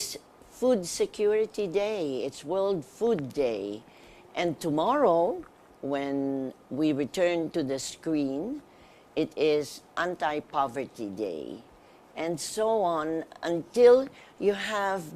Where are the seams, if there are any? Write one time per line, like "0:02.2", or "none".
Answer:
0:03.9